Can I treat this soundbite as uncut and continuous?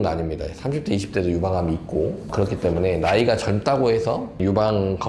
yes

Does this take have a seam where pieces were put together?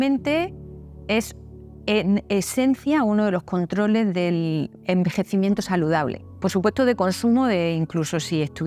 no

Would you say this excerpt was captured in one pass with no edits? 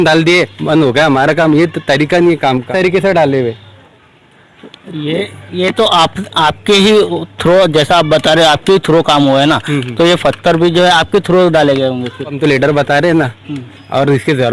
no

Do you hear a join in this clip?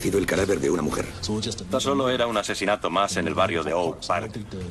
no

